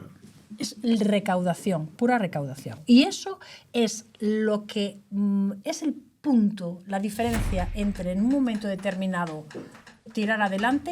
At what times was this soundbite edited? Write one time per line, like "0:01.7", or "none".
0:02.7